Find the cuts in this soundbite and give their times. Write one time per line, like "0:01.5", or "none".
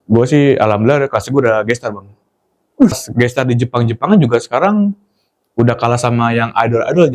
0:03.0

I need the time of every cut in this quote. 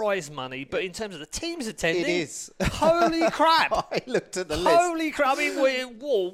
none

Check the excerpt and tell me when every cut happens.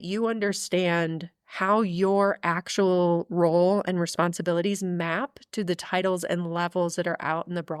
none

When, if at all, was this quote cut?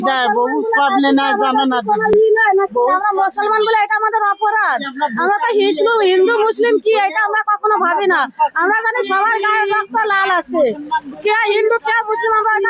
none

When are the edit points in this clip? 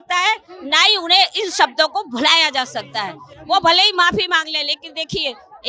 none

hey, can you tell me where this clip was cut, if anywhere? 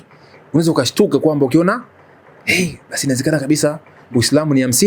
none

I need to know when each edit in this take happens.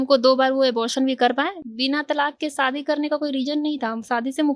0:01.6

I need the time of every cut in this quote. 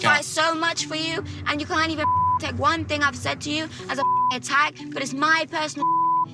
none

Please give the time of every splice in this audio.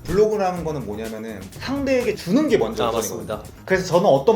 0:01.4

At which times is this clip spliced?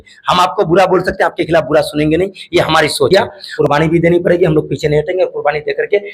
0:03.1

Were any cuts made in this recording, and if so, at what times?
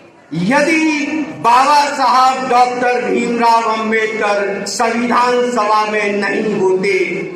none

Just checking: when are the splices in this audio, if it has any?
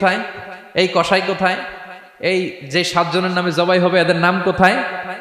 none

